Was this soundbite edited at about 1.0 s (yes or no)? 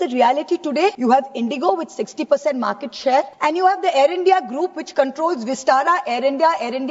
yes